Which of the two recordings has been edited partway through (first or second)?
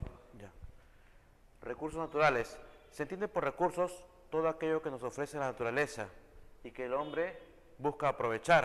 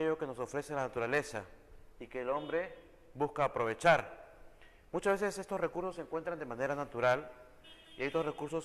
second